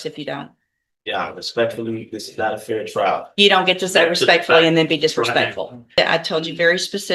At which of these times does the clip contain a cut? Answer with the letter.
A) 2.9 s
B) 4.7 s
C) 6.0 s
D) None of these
C